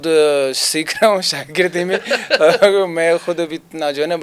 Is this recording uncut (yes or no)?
yes